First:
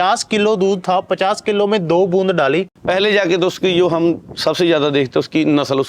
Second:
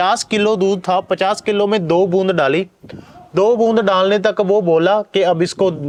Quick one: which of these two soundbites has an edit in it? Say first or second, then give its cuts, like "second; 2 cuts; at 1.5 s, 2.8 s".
first; 1 cut; at 2.8 s